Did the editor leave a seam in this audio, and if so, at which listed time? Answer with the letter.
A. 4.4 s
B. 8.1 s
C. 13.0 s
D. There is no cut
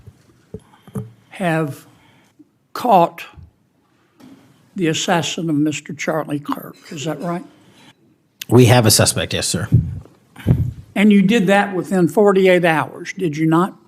D